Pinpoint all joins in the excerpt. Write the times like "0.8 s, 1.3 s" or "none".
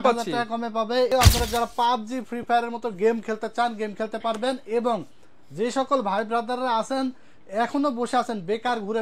1.1 s